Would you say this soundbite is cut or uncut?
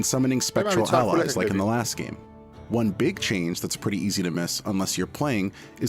cut